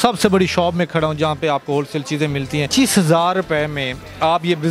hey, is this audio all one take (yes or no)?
no